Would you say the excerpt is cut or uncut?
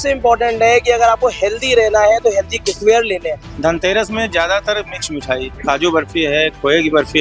cut